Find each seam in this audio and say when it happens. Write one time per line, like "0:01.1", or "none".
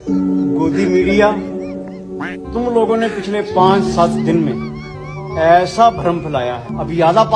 none